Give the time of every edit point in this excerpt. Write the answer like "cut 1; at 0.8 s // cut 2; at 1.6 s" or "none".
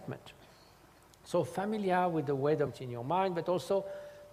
none